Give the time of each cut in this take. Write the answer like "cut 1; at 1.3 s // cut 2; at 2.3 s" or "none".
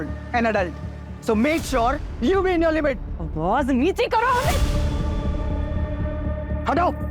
none